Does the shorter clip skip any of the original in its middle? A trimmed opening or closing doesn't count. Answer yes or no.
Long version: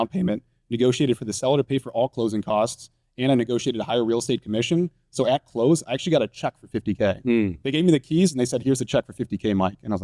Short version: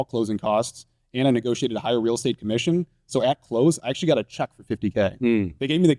no